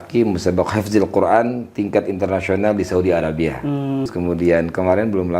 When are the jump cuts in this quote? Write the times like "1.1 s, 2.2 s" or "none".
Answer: 4.1 s